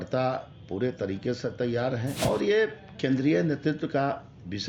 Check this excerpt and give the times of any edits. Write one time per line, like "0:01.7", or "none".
0:02.1